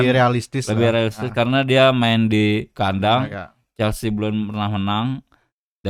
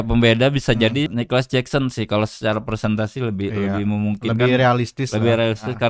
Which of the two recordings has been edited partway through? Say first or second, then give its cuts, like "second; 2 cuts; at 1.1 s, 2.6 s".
second; 1 cut; at 1.1 s